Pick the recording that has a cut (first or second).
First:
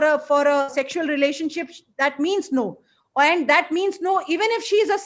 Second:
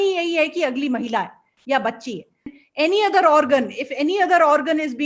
second